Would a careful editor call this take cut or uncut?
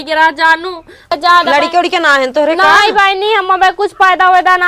cut